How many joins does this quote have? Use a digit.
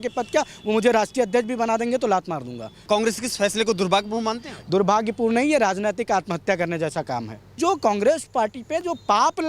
2